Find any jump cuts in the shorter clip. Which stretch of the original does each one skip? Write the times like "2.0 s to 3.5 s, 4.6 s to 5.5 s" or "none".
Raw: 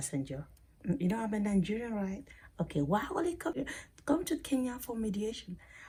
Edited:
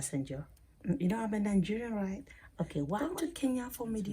3.0 s to 4.1 s

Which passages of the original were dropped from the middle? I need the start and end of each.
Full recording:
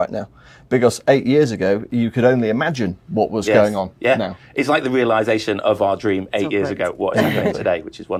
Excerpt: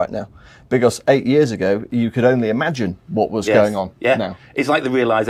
none

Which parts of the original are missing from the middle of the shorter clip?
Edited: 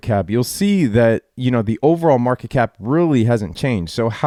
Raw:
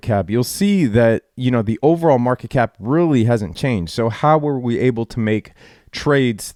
none

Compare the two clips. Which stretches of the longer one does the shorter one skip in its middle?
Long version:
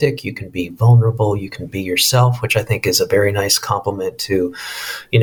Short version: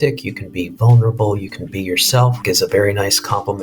2.4 s to 2.8 s

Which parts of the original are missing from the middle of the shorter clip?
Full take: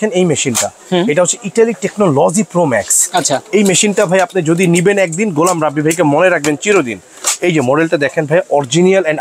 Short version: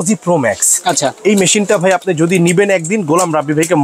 none

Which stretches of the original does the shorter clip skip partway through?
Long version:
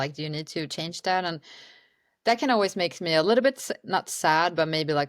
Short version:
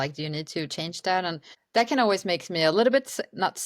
1.5 s to 2.0 s

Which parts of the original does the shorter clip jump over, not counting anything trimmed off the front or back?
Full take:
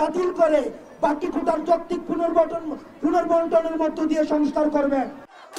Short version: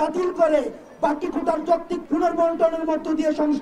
2.0 s to 2.9 s

